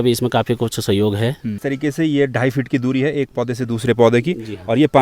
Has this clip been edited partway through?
yes; 1 cut; at 1.6 s

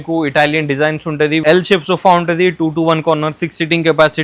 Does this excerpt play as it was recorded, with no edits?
no; 1 cut; at 1.4 s

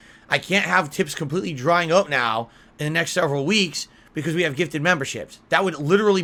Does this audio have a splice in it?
no; 0 cuts

